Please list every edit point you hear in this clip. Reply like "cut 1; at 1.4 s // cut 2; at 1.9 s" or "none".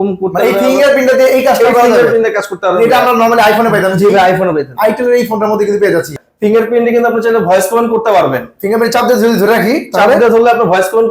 cut 1; at 6.2 s